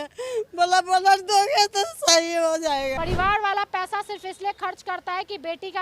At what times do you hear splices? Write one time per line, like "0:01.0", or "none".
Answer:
0:02.9